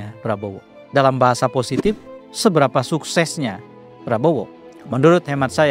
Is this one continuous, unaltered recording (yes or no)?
no